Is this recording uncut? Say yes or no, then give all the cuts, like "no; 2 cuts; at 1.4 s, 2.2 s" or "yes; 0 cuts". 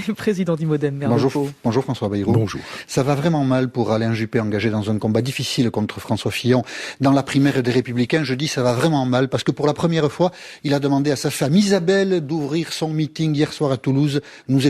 yes; 0 cuts